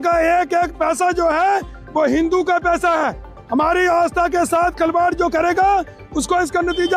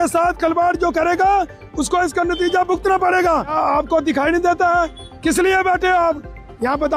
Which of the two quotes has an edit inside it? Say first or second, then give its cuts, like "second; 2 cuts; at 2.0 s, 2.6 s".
second; 1 cut; at 3.5 s